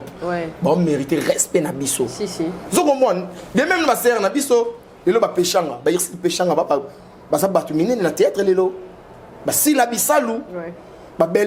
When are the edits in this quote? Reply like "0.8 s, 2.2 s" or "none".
none